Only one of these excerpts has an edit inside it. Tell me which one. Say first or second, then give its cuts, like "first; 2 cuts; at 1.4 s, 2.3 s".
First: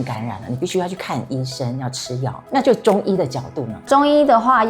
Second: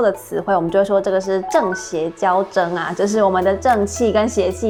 first; 2 cuts; at 2.4 s, 3.8 s